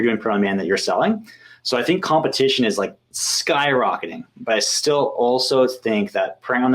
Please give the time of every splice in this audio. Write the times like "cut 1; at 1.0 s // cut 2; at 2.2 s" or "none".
none